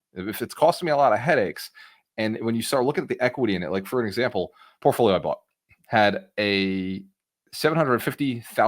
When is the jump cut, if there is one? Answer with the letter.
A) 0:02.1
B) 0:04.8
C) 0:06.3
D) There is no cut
B